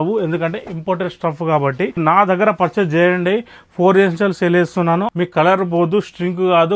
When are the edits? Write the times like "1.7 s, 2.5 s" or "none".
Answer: 2.0 s, 5.1 s